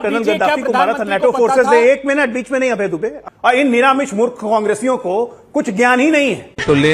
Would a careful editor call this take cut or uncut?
cut